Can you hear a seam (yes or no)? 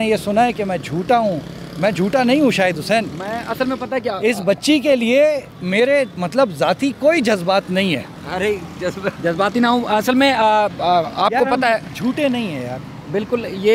yes